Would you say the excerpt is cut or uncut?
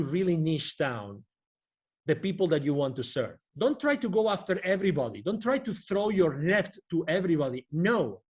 cut